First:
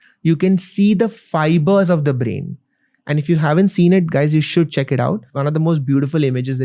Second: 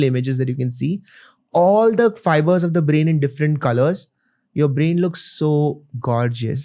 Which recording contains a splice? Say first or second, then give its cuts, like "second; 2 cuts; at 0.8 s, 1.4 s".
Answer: first; 1 cut; at 5.3 s